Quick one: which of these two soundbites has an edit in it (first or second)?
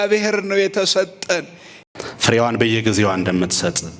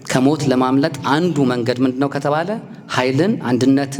first